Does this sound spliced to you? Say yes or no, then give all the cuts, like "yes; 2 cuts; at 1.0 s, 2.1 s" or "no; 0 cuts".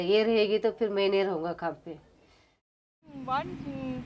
yes; 1 cut; at 2.8 s